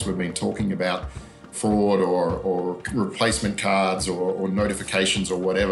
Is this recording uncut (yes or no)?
no